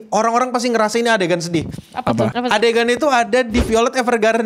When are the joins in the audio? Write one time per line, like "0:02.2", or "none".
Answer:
0:02.3